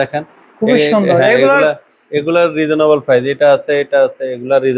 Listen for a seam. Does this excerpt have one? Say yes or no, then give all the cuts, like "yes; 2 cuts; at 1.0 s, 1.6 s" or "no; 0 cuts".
no; 0 cuts